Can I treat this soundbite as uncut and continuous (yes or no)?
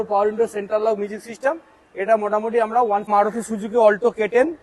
no